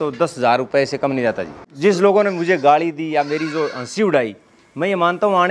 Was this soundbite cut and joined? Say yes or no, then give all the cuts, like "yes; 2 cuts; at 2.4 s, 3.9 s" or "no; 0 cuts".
yes; 1 cut; at 1.6 s